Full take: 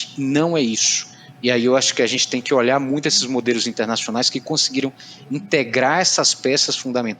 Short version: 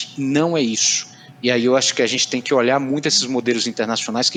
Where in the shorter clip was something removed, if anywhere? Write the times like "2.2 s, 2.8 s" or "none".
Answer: none